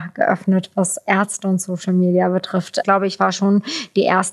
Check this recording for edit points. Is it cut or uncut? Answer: cut